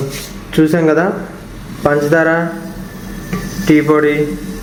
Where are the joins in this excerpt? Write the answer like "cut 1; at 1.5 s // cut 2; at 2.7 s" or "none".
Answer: none

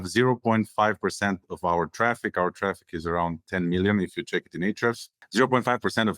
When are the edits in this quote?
cut 1; at 5.1 s

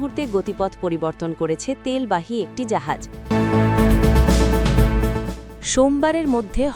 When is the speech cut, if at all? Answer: cut 1; at 3.1 s // cut 2; at 5.6 s

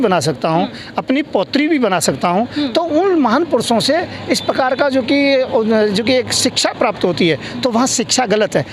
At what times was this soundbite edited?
none

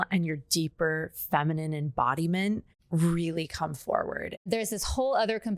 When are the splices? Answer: cut 1; at 2.7 s // cut 2; at 4.5 s

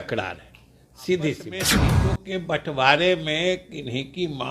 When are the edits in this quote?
cut 1; at 1.8 s

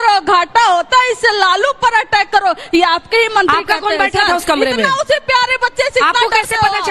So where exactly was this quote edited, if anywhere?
cut 1; at 2.6 s

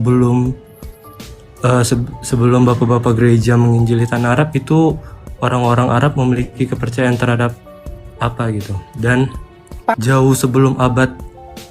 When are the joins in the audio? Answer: cut 1; at 9.9 s

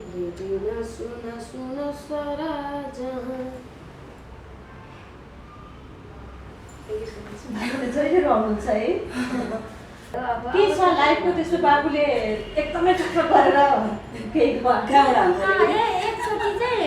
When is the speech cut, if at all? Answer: cut 1; at 10.1 s

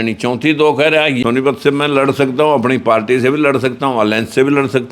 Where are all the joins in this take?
cut 1; at 1.2 s

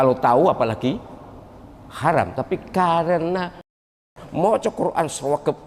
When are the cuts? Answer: cut 1; at 3.9 s

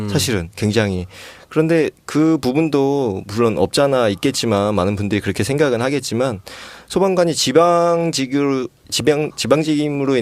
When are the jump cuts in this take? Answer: cut 1; at 7.6 s

